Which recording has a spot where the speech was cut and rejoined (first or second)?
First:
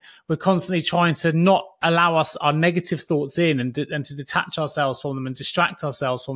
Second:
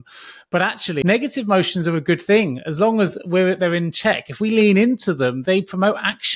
second